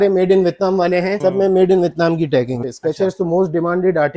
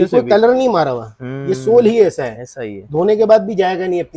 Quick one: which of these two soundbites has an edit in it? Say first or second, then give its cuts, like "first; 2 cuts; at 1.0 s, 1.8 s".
first; 2 cuts; at 1.2 s, 2.6 s